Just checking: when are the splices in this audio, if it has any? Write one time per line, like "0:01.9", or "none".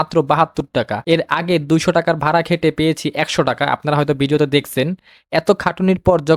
none